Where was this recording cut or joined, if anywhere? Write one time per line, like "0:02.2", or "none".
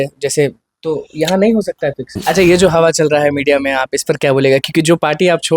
0:02.1